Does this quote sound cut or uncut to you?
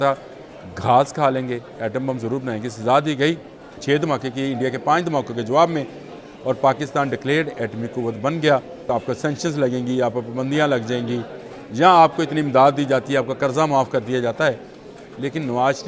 cut